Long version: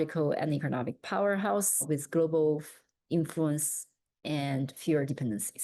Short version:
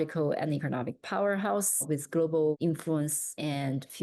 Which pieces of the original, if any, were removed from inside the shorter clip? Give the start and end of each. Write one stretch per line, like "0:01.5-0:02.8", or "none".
0:02.9-0:03.8